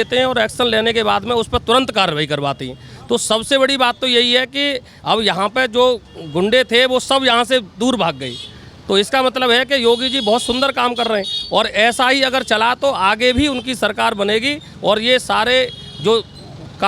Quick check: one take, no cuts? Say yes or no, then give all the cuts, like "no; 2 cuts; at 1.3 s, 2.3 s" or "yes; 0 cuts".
yes; 0 cuts